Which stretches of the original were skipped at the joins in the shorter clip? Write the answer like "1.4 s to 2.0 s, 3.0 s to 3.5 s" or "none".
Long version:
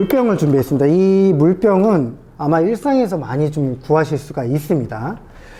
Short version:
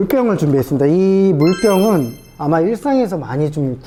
none